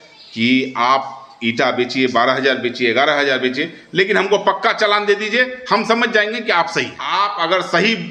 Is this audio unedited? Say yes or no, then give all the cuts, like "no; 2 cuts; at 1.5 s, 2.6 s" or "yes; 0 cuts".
no; 1 cut; at 7.0 s